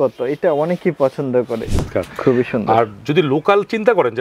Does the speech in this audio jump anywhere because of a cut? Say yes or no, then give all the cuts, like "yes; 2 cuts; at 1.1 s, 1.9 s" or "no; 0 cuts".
yes; 1 cut; at 1.9 s